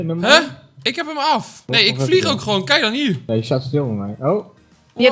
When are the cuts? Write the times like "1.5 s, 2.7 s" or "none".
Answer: 1.6 s, 3.2 s